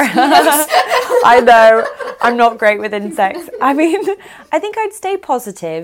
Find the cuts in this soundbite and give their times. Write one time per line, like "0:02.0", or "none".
none